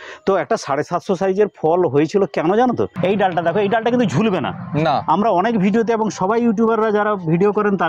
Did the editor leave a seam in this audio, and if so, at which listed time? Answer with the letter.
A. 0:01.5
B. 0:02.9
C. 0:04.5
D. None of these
B